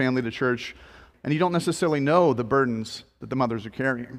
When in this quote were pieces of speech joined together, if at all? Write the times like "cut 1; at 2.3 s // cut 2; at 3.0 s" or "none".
cut 1; at 1.0 s